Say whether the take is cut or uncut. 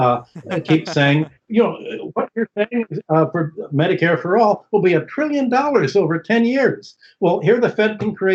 uncut